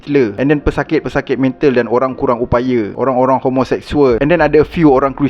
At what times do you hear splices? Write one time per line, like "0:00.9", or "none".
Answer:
0:04.2